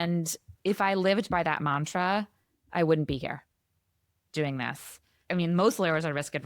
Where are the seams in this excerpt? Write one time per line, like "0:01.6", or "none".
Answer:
0:05.2

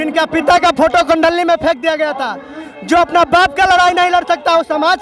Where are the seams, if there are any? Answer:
none

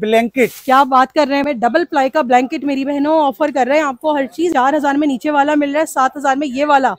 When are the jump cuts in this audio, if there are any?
0:01.5
0:04.5

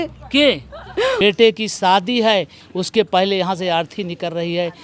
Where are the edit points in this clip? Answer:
0:01.2

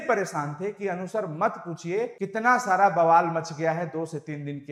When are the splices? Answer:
none

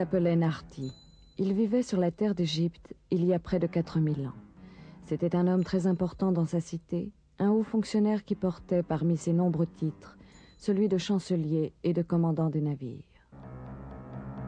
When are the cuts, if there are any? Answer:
0:10.8

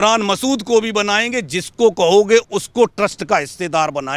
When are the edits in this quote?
none

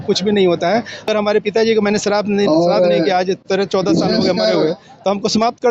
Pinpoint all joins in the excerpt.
0:01.1

